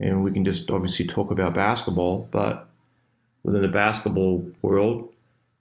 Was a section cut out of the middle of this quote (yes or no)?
yes